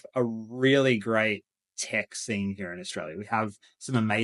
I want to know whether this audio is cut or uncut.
uncut